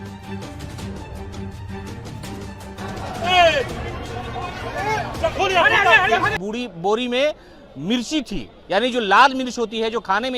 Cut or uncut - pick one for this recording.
cut